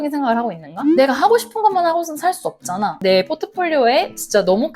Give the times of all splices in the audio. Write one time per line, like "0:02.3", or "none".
0:03.0